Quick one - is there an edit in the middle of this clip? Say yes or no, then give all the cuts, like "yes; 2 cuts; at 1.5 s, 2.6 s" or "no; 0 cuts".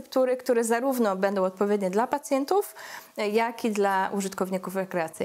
no; 0 cuts